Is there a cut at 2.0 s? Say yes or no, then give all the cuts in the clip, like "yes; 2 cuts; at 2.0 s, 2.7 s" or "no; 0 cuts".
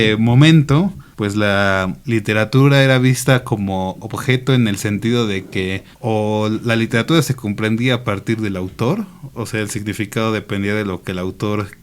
yes; 2 cuts; at 1.1 s, 2.0 s